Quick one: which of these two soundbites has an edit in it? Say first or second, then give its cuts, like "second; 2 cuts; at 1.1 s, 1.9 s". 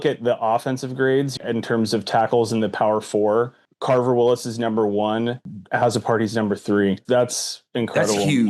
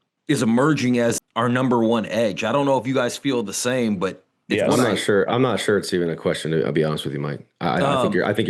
first; 3 cuts; at 3.7 s, 5.6 s, 7.0 s